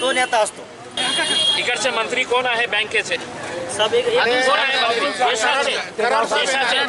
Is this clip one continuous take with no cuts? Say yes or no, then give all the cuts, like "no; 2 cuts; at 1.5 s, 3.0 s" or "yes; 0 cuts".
no; 1 cut; at 1.0 s